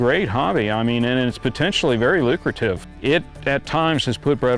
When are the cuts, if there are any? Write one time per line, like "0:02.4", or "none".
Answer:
0:02.9